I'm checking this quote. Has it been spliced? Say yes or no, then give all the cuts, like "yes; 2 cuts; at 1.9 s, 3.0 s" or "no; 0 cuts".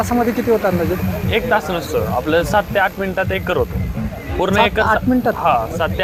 no; 0 cuts